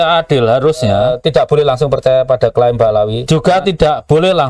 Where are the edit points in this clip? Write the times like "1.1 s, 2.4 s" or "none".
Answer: 1.0 s, 3.2 s